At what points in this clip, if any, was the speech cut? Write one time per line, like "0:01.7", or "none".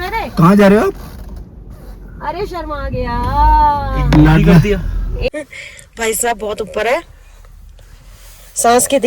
0:05.3